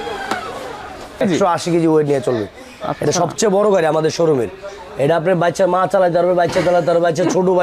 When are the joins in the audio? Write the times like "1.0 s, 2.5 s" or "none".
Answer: 1.2 s